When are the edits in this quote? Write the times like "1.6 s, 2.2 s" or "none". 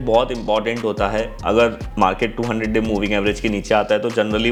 none